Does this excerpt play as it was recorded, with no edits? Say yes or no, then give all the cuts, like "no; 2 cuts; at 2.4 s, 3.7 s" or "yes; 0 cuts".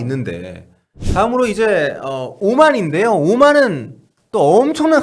no; 1 cut; at 0.9 s